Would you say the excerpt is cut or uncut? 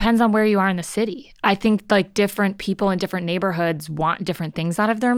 uncut